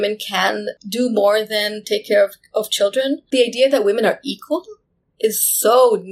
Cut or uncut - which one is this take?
cut